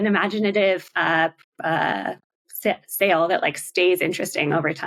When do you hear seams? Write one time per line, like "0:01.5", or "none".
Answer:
none